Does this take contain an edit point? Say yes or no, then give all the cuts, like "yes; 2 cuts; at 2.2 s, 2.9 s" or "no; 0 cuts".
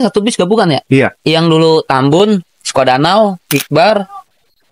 no; 0 cuts